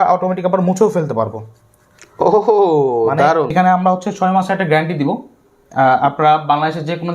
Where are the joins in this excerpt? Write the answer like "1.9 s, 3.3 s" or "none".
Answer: 3.5 s